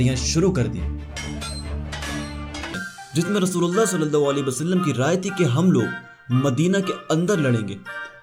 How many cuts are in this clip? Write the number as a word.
one